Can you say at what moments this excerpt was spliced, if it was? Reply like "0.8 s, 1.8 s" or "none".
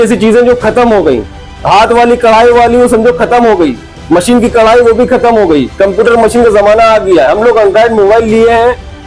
none